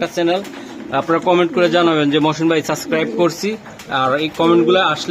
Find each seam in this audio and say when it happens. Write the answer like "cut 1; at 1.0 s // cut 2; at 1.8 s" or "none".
none